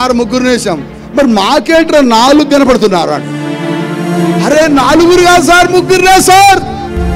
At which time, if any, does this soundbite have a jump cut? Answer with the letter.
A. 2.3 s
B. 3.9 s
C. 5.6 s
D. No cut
D